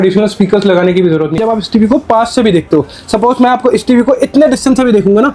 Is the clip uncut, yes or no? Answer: no